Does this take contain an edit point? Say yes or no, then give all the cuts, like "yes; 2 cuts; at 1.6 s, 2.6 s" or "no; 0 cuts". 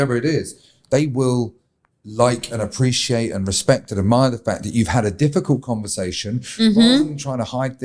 no; 0 cuts